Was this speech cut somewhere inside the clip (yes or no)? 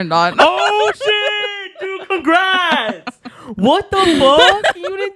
no